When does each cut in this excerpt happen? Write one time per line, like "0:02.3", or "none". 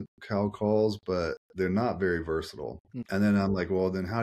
0:01.4
0:03.0